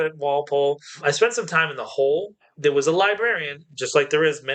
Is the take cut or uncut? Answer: cut